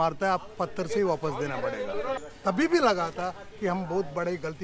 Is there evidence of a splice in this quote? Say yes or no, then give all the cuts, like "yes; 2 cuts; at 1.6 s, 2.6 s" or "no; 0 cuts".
yes; 1 cut; at 2.3 s